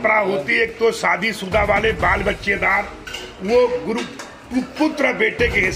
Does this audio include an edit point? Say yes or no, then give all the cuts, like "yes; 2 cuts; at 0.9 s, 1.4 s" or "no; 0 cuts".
no; 0 cuts